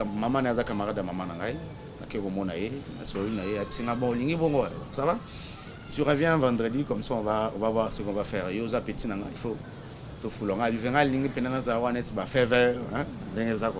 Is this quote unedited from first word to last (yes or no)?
yes